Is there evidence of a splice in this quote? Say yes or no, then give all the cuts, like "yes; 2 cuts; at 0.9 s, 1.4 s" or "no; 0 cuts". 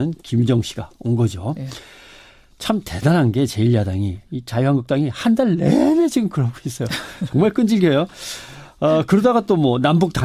no; 0 cuts